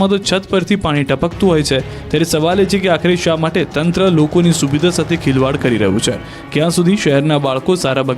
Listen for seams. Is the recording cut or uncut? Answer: cut